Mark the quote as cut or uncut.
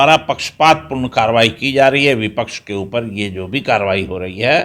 uncut